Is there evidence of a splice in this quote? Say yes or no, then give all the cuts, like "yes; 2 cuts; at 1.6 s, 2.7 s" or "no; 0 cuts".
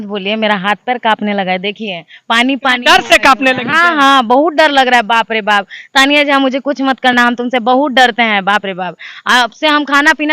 no; 0 cuts